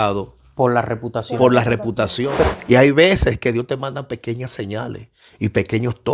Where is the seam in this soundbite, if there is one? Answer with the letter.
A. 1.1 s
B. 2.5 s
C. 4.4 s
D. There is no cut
B